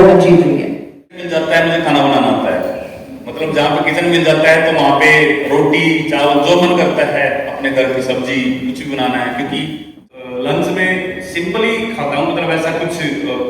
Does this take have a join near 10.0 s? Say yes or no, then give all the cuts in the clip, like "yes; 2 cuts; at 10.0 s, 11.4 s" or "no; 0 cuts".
yes; 2 cuts; at 1.3 s, 10.0 s